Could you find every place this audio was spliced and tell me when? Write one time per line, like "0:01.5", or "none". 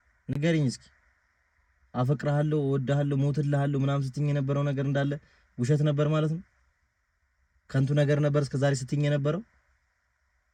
none